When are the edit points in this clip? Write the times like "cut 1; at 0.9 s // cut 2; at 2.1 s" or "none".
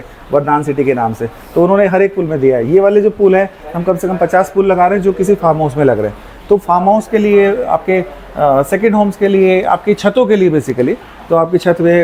none